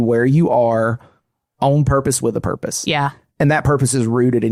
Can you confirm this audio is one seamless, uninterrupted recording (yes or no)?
yes